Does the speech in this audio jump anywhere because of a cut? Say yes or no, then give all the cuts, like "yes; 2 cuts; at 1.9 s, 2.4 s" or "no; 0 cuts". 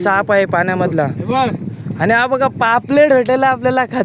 no; 0 cuts